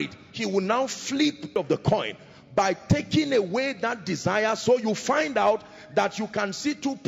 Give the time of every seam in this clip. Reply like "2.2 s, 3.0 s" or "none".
1.5 s